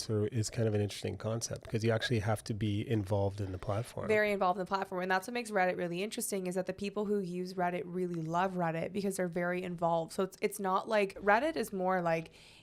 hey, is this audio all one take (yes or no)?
no